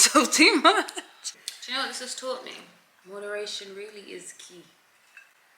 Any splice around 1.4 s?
yes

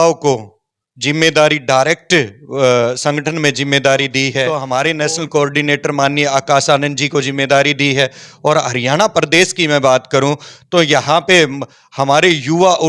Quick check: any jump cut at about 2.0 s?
no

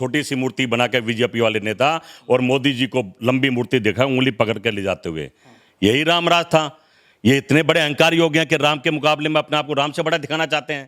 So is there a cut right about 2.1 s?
no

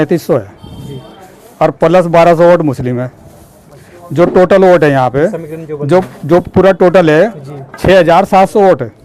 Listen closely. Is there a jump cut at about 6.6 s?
no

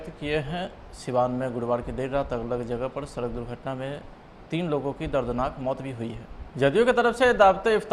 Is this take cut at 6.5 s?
yes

